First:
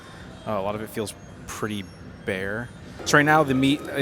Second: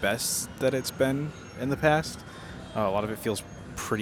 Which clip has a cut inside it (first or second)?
first